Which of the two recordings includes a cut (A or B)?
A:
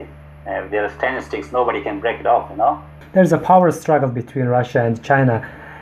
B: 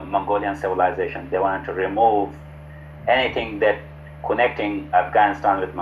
A